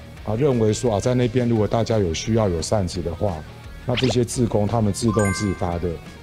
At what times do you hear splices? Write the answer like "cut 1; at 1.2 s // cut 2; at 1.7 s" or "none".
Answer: none